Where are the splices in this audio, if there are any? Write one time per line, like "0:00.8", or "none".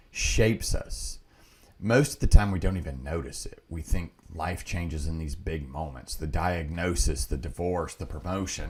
none